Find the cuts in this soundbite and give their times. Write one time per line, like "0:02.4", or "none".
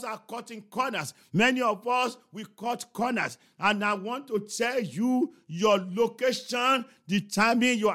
none